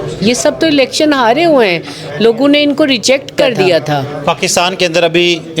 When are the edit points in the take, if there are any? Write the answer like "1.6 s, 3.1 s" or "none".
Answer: 4.1 s